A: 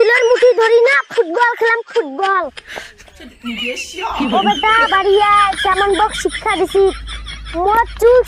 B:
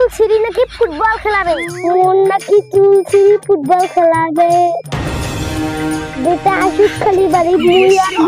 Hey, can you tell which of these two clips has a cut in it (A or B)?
B